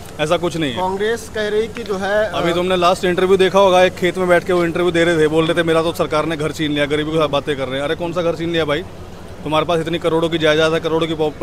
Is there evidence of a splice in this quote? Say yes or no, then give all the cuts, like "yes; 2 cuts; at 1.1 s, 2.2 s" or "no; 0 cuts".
no; 0 cuts